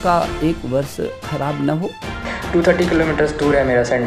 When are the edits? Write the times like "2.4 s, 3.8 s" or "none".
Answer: 2.2 s